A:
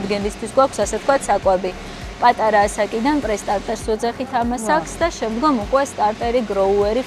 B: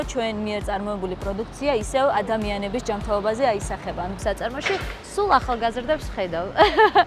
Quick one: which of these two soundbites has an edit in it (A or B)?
B